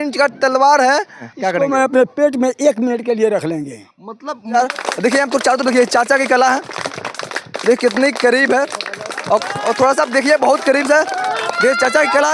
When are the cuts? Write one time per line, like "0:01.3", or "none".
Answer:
0:01.3
0:04.5